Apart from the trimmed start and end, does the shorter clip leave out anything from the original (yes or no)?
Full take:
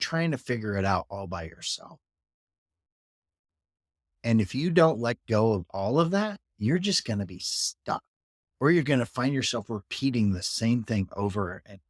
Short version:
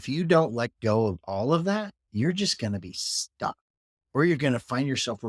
no